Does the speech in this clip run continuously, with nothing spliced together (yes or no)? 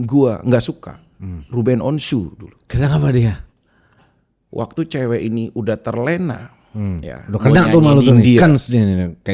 yes